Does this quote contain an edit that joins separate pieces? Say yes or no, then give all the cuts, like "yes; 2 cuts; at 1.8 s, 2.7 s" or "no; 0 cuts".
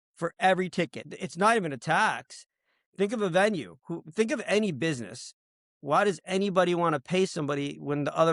yes; 1 cut; at 1.0 s